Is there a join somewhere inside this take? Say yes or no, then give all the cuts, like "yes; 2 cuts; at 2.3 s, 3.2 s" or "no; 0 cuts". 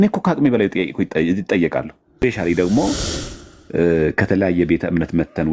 yes; 1 cut; at 2.2 s